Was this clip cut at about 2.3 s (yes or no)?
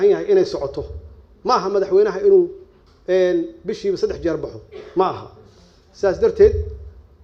no